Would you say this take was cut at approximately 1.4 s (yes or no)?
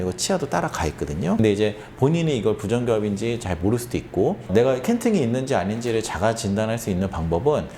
yes